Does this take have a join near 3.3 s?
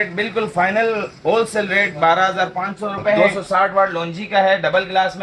yes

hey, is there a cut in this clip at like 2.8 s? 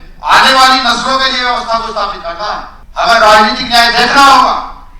yes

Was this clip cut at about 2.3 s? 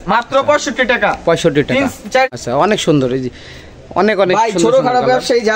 yes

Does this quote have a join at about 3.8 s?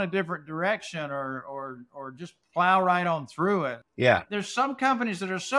yes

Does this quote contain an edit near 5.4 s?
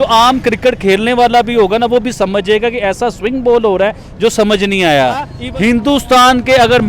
yes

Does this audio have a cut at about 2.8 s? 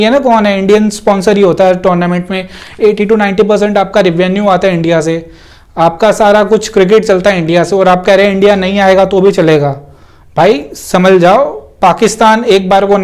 yes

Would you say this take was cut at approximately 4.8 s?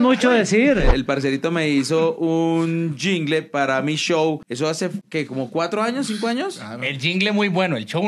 yes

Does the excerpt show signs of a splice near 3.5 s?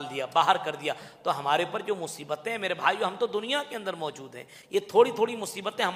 no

